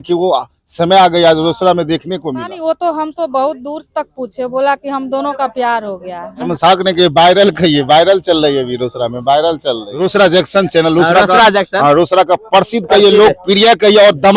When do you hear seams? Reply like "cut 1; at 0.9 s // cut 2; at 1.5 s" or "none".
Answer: cut 1; at 2.5 s // cut 2; at 6.5 s // cut 3; at 9.9 s